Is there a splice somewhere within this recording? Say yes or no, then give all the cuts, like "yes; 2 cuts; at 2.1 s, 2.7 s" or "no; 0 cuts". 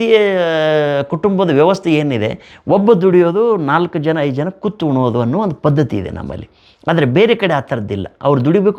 no; 0 cuts